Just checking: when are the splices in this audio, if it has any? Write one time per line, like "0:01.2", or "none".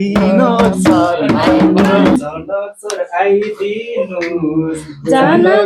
0:02.1